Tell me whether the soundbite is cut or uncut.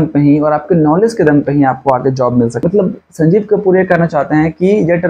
cut